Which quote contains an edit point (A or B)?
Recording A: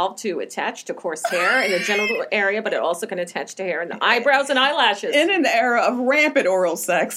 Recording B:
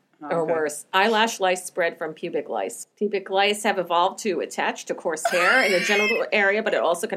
B